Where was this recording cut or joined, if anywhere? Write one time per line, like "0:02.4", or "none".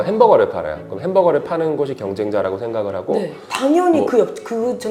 none